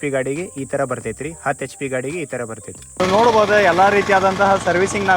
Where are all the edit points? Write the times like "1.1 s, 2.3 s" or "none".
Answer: 2.9 s